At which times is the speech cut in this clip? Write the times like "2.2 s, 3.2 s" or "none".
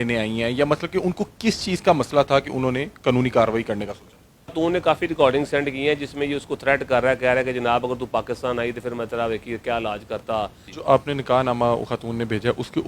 4.5 s, 10.7 s